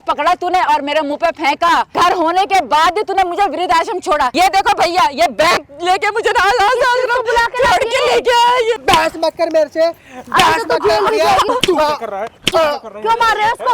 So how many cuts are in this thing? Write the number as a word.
four